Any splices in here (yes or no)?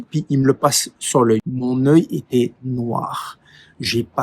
yes